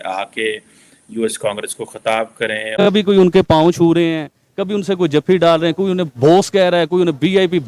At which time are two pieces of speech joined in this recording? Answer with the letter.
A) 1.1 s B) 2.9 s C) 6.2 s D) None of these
B